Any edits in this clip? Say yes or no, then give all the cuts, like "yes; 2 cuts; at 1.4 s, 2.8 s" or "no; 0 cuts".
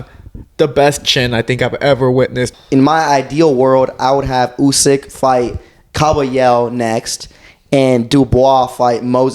yes; 1 cut; at 2.5 s